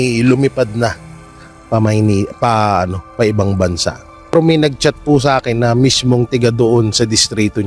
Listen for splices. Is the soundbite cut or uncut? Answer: cut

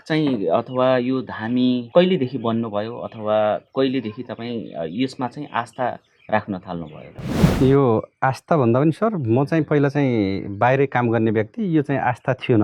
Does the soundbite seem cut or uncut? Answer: cut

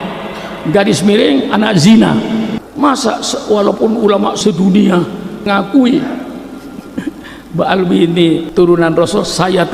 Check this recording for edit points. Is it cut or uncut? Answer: cut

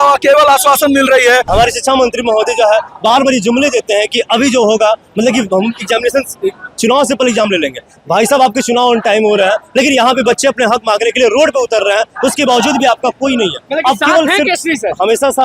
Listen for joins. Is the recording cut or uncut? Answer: cut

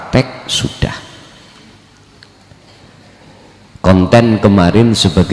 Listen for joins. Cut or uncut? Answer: uncut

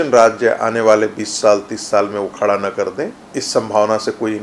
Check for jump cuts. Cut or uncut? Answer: cut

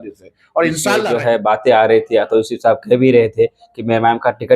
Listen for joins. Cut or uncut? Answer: cut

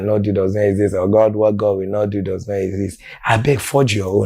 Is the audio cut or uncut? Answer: cut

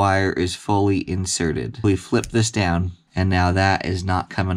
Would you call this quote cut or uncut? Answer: cut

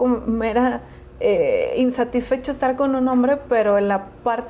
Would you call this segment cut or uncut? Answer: uncut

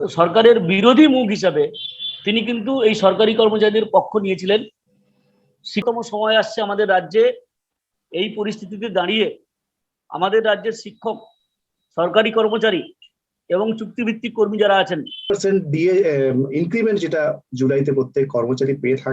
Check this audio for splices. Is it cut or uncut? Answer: cut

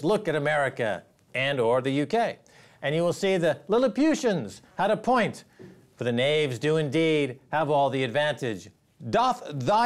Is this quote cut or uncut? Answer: cut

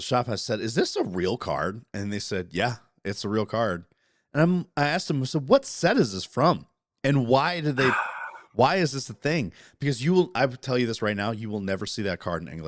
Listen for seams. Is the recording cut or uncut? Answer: uncut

